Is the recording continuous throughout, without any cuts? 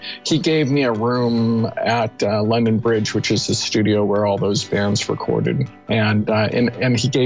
yes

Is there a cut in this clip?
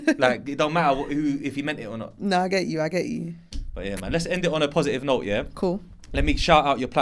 no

